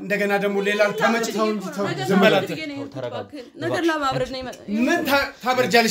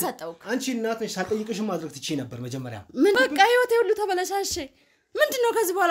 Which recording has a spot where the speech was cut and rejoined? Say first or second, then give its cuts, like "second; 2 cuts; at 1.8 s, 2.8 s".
second; 1 cut; at 3.2 s